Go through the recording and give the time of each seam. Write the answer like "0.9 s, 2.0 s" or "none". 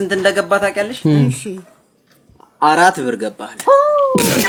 none

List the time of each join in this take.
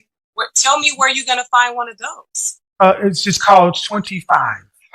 none

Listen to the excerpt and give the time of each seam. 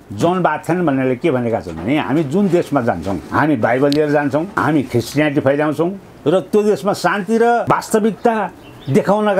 3.2 s, 4.5 s, 7.6 s

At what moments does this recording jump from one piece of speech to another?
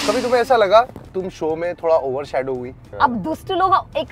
2.9 s

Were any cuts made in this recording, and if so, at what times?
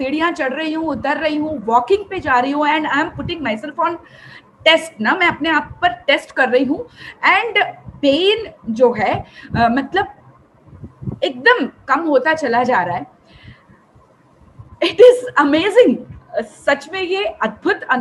none

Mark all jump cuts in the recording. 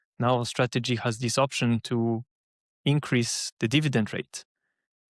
3.4 s

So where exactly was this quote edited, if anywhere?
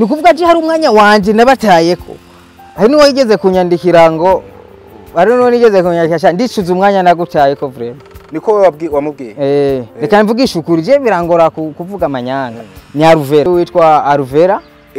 13.5 s

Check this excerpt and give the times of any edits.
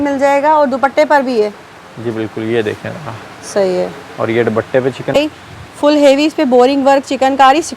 5.1 s

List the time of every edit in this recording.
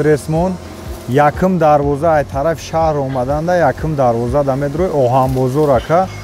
none

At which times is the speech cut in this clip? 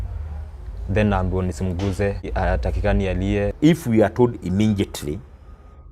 2.2 s, 3.5 s

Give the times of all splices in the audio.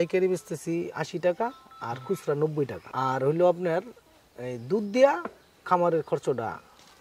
2.8 s

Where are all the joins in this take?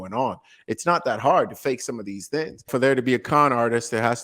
2.7 s

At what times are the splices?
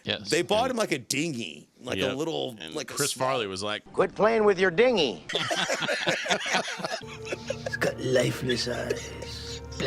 5.3 s, 7.0 s

